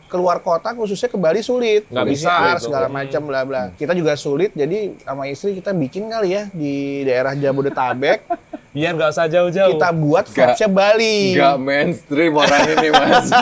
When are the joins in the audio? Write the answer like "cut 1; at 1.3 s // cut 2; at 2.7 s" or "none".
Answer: cut 1; at 3.7 s